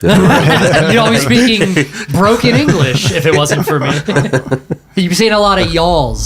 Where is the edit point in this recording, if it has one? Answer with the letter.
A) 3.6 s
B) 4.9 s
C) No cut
B